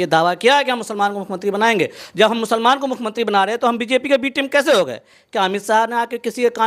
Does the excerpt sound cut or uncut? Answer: uncut